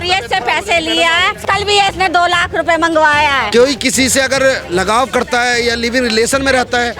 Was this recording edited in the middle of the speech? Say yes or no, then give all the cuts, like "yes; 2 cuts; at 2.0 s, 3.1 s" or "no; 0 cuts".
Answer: yes; 2 cuts; at 1.4 s, 3.4 s